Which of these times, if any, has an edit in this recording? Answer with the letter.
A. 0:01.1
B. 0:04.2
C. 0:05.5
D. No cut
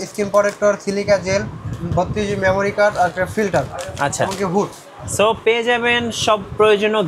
D